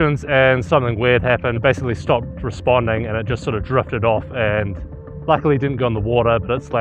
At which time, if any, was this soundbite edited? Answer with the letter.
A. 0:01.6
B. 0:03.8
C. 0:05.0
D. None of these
A